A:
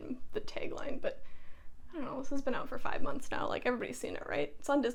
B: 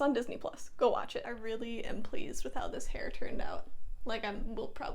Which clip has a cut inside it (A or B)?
B